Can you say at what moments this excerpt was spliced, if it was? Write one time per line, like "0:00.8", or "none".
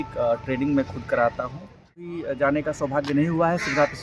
0:02.0